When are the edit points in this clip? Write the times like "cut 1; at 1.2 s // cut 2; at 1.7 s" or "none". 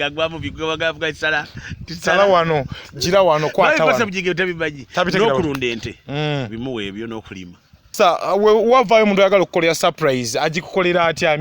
cut 1; at 7.9 s